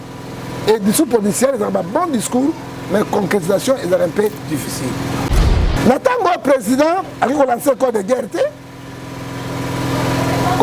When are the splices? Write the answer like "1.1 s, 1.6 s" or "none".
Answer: 5.5 s